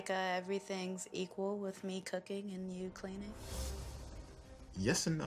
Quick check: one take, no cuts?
no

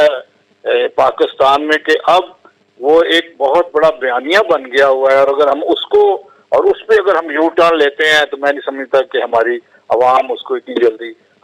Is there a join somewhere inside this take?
no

